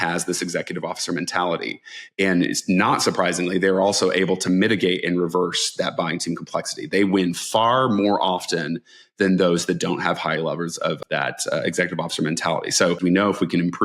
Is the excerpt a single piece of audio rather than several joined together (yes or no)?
no